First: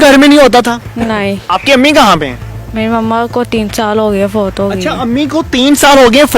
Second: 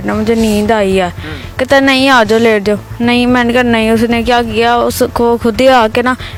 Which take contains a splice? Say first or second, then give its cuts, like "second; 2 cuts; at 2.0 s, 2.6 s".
first; 1 cut; at 1.4 s